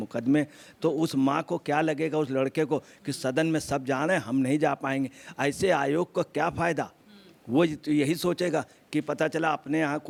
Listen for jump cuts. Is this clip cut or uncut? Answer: uncut